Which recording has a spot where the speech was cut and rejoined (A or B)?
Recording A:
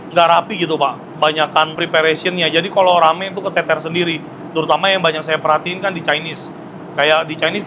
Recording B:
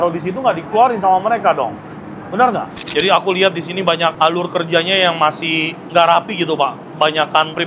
B